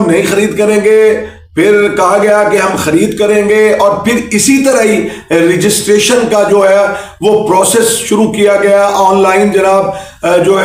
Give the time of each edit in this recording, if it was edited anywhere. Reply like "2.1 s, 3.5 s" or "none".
none